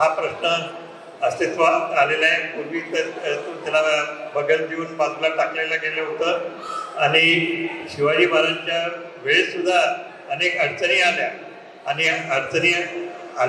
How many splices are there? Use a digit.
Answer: 0